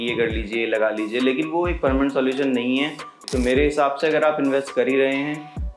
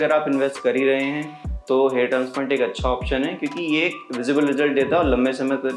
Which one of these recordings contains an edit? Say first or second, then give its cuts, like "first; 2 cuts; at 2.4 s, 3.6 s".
first; 1 cut; at 3.2 s